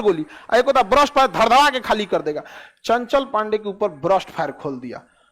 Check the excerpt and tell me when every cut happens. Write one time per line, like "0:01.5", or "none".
none